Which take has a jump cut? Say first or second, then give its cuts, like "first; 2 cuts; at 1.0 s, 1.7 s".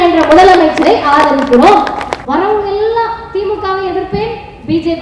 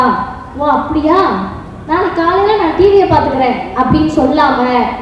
first; 1 cut; at 2.1 s